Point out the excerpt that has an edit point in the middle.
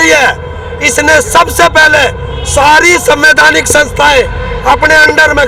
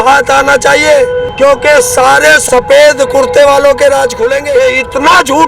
second; 1 cut; at 4.4 s

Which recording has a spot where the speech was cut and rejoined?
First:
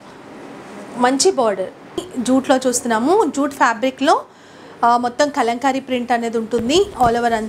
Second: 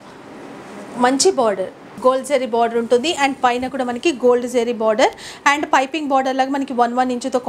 first; 1 cut; at 2.0 s

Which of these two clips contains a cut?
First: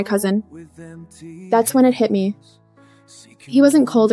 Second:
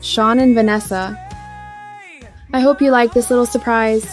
second; 2 cuts; at 1.2 s, 2.4 s

